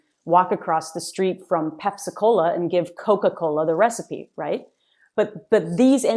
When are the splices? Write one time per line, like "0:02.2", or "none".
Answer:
none

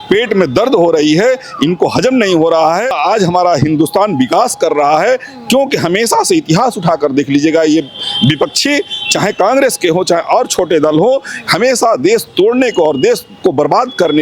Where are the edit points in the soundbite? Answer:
0:03.0

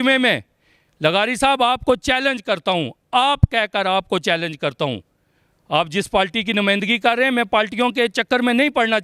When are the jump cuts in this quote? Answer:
none

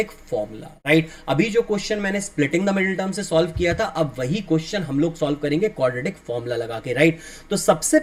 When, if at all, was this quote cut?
none

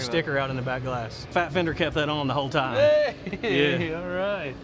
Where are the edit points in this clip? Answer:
0:01.3

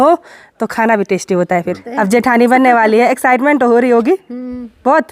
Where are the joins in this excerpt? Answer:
0:01.9

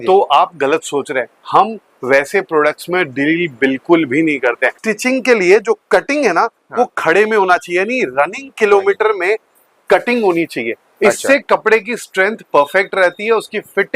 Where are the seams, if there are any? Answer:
0:04.7

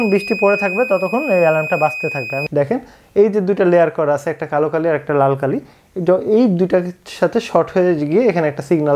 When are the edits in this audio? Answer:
0:02.3

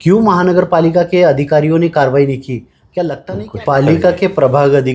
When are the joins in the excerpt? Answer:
0:03.2

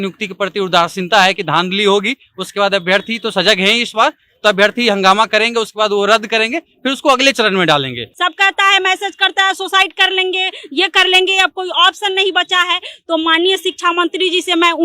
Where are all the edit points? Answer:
0:08.0

